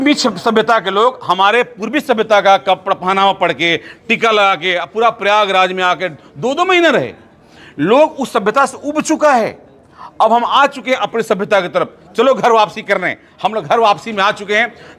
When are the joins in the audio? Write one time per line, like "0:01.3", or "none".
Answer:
none